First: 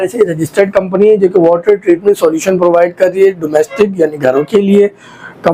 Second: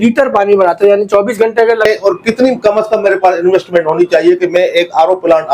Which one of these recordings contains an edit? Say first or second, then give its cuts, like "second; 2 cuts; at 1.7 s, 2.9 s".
second; 1 cut; at 1.9 s